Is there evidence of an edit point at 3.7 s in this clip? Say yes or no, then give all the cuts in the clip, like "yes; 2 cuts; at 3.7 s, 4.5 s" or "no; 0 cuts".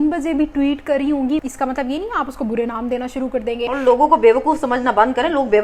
yes; 2 cuts; at 1.4 s, 3.7 s